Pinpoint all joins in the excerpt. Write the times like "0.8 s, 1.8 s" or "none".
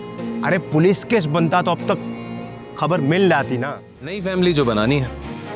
4.2 s